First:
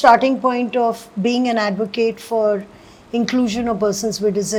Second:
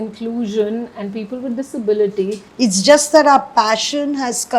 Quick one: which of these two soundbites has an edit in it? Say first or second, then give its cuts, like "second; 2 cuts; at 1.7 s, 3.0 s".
second; 1 cut; at 2.4 s